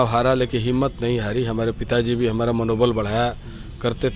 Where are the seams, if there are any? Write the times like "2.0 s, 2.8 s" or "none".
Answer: none